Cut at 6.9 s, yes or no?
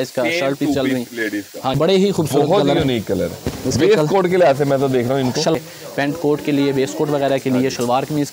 no